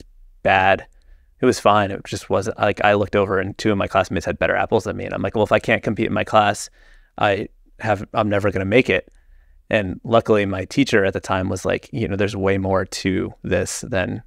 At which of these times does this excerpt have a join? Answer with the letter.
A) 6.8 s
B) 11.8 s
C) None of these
C